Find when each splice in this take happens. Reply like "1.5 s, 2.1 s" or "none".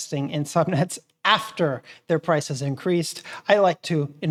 none